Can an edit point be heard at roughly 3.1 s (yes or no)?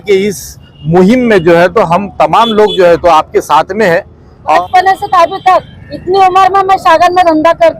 no